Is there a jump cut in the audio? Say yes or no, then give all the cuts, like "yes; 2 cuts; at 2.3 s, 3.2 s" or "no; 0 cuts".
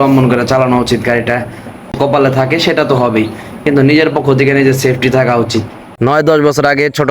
yes; 2 cuts; at 1.9 s, 5.8 s